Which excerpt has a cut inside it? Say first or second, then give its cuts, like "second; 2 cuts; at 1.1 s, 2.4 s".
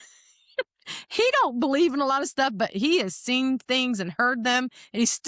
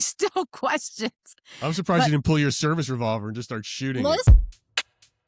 second; 1 cut; at 4.2 s